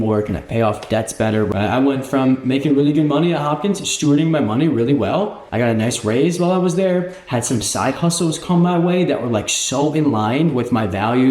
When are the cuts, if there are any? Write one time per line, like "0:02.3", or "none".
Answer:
0:01.5
0:05.4